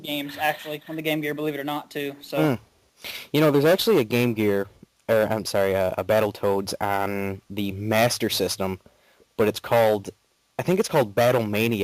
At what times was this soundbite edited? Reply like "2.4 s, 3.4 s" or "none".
9.9 s